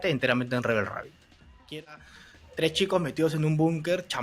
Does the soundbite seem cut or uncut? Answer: cut